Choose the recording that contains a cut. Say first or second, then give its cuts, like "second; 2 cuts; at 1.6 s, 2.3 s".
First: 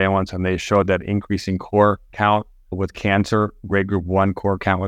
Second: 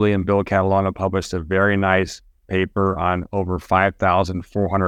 first; 1 cut; at 2.4 s